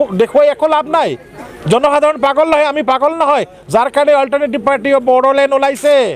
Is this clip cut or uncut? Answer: uncut